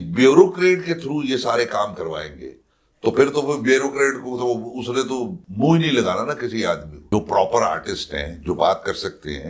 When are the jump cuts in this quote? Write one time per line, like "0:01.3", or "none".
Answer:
0:05.4
0:07.1